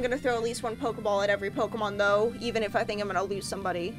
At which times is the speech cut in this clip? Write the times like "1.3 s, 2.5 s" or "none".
none